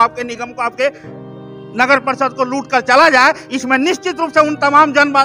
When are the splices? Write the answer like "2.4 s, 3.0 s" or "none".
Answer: none